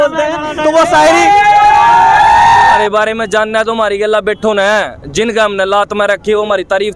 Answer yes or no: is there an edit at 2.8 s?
yes